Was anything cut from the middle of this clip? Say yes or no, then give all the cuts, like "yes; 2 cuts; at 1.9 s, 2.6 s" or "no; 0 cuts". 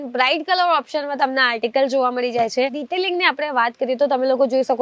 yes; 1 cut; at 2.8 s